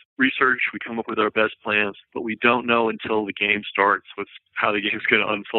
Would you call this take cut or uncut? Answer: cut